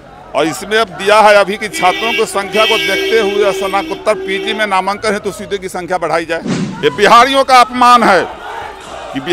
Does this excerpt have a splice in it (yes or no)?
yes